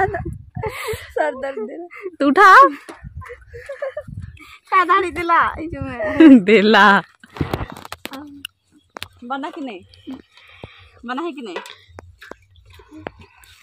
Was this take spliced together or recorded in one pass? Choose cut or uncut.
cut